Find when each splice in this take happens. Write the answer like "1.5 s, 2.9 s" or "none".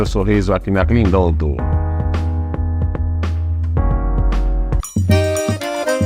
none